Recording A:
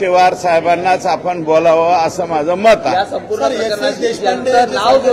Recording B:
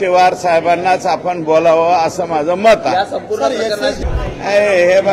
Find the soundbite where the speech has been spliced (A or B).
B